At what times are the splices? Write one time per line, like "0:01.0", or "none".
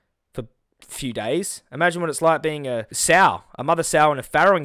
0:02.9

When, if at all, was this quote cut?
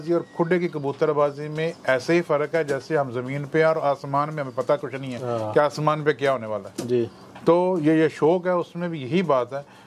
none

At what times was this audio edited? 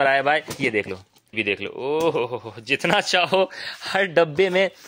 0:01.0

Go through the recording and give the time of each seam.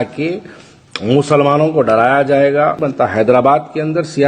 0:02.8

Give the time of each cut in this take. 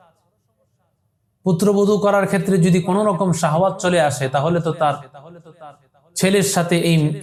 none

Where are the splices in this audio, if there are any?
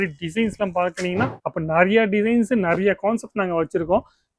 0:01.4

